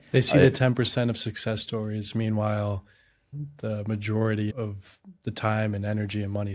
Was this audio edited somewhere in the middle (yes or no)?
yes